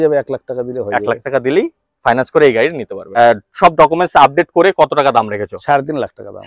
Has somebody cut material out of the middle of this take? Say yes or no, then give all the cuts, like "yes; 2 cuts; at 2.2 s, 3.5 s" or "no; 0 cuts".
yes; 1 cut; at 3.2 s